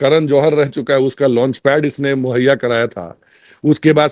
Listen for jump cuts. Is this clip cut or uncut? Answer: uncut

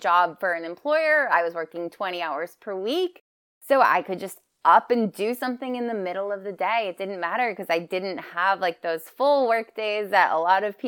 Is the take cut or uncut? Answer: uncut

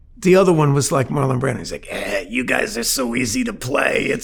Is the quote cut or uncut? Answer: uncut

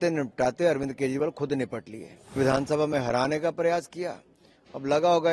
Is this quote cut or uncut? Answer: cut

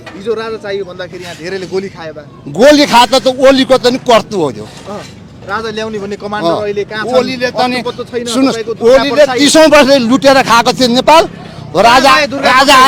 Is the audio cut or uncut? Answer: uncut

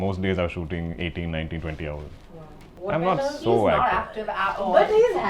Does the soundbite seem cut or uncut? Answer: cut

